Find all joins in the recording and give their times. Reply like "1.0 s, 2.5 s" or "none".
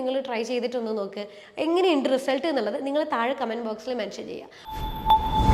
4.5 s